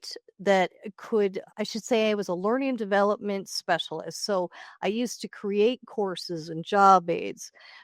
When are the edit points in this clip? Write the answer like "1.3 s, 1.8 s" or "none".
1.5 s

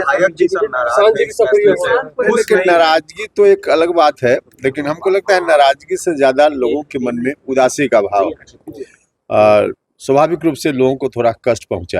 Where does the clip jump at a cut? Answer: none

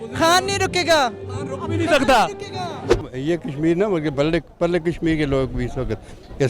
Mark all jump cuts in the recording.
3.0 s

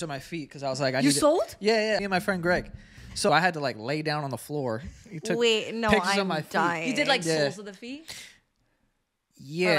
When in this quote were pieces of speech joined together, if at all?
2.0 s, 3.3 s

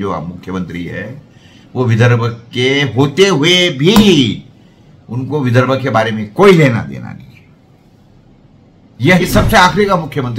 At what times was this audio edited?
9.2 s

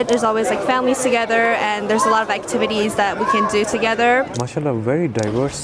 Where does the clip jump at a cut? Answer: 4.4 s

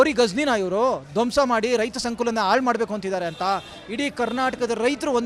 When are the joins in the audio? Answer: none

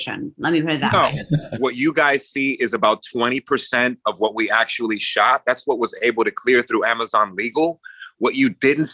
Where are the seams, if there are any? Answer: 1.5 s

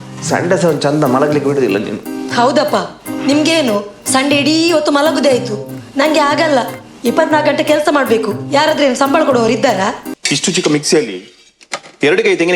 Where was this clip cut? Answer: 10.1 s

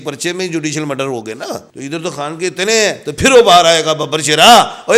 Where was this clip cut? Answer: 1.7 s

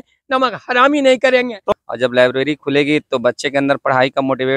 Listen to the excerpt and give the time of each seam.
1.7 s

